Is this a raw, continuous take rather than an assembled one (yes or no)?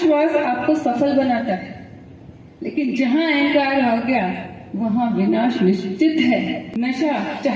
no